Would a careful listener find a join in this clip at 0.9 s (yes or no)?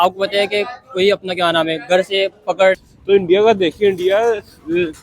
no